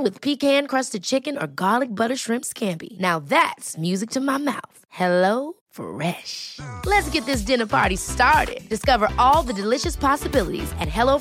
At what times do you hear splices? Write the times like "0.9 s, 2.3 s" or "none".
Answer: none